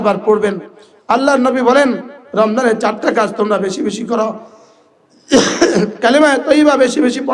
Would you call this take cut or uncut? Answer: uncut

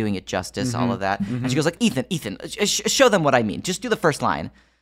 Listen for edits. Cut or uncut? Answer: cut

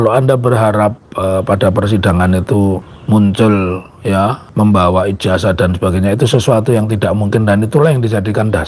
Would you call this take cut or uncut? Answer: cut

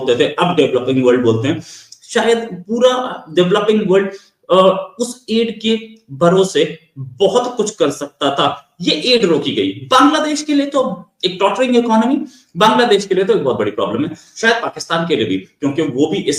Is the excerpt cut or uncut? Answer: uncut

